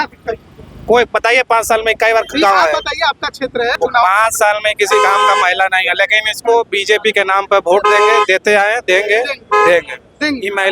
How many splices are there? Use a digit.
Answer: 1